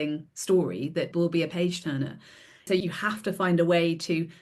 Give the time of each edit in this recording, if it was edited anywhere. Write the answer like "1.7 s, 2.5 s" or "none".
1.1 s, 2.7 s